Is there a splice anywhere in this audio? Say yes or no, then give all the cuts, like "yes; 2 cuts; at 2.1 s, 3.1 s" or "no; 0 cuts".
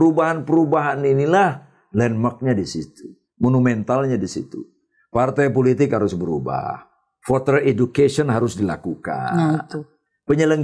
no; 0 cuts